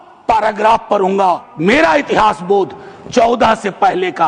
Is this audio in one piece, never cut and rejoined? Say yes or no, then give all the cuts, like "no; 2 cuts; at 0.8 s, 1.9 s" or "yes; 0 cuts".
no; 1 cut; at 1.5 s